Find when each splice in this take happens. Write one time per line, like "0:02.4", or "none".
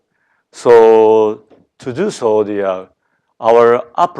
0:01.3